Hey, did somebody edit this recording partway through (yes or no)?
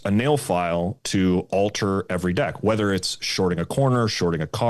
no